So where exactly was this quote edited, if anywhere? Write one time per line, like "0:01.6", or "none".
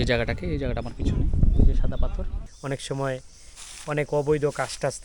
0:02.4